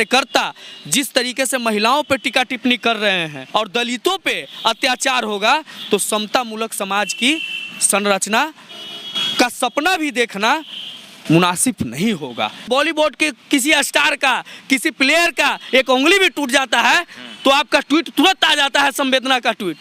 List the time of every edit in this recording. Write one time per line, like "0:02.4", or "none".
0:03.4
0:12.6